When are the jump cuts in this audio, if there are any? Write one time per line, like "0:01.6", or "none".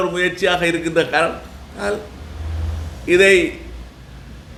none